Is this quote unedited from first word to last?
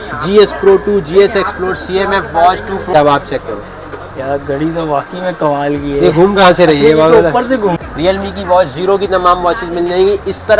no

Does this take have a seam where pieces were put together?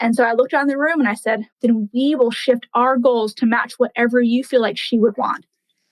yes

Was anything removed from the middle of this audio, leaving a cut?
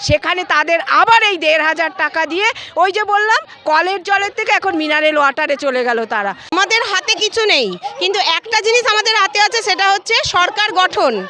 yes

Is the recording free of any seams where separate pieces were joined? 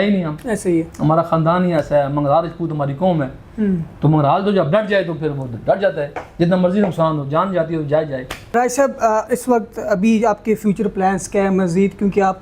no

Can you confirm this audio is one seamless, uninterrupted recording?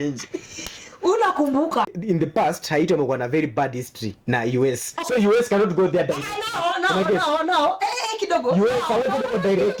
no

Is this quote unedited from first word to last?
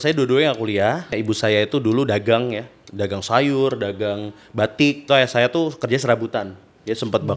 no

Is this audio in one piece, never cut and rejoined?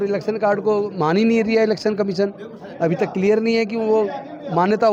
yes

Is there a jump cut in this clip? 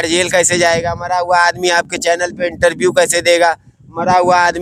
no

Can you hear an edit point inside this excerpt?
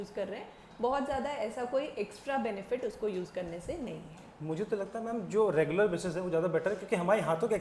no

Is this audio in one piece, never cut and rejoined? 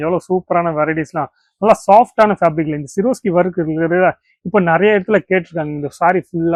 yes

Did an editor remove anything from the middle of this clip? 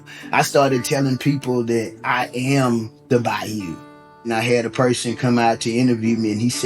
yes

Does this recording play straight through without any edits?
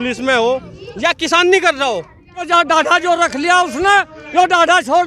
no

